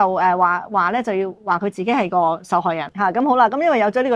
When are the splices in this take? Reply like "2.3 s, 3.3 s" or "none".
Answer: 2.9 s